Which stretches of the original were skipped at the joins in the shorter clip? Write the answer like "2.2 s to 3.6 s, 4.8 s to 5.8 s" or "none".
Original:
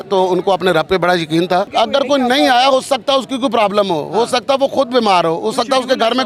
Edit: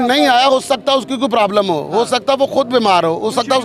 none